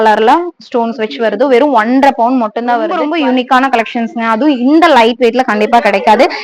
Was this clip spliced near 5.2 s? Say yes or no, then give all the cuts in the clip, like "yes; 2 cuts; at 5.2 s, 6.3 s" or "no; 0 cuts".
no; 1 cut; at 3.0 s